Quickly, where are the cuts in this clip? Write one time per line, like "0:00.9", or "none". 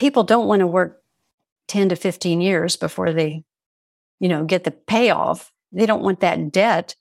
0:05.6